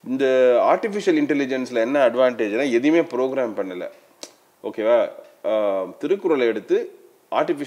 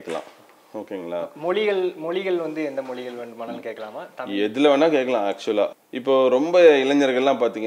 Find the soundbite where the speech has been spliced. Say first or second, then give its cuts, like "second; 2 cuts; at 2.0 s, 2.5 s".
second; 1 cut; at 5.9 s